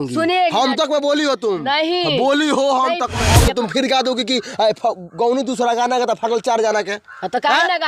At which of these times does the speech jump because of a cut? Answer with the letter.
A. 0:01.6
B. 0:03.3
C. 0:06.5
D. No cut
B